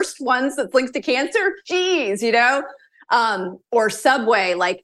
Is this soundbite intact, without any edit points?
yes; 0 cuts

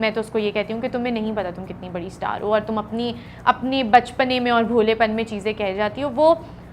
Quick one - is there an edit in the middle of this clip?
no; 0 cuts

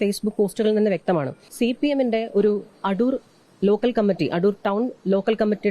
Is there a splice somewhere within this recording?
yes; 1 cut; at 1.4 s

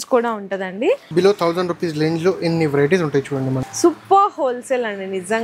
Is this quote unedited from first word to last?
no; 2 cuts; at 1.1 s, 3.6 s

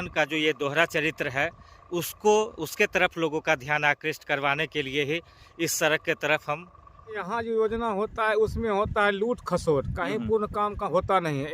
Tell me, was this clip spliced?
yes; 1 cut; at 7.2 s

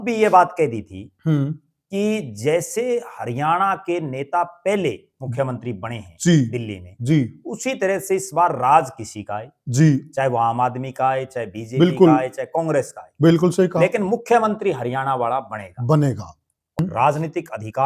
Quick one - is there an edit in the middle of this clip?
yes; 1 cut; at 16.8 s

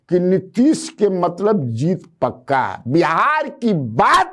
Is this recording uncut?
yes; 0 cuts

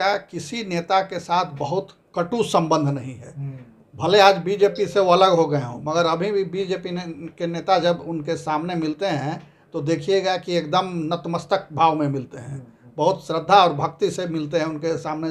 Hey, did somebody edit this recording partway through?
no; 0 cuts

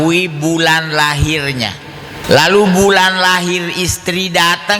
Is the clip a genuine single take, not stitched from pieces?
no; 1 cut; at 2.2 s

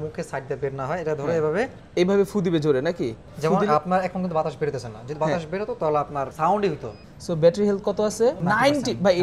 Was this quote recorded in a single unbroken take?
no; 4 cuts; at 1.8 s, 6.3 s, 7.0 s, 8.4 s

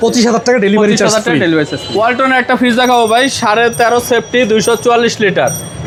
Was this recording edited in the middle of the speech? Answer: no; 0 cuts

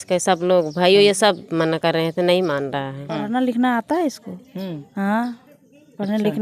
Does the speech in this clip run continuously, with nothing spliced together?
no; 1 cut; at 3.2 s

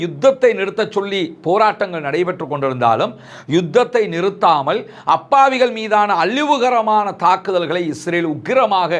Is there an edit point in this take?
no; 0 cuts

